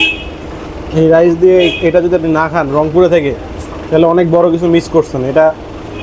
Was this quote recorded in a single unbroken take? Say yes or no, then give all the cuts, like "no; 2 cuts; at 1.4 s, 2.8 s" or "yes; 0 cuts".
yes; 0 cuts